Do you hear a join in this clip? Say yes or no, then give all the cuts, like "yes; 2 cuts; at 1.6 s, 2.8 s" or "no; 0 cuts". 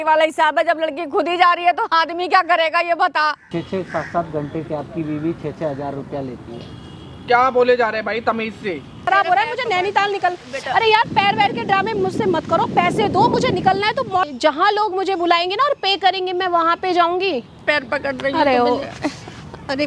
yes; 4 cuts; at 3.4 s, 9.0 s, 14.3 s, 17.6 s